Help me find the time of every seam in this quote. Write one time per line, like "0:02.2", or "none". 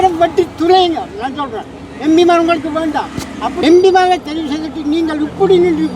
0:03.6